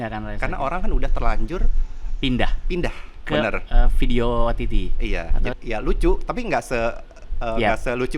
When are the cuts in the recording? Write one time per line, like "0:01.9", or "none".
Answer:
0:05.6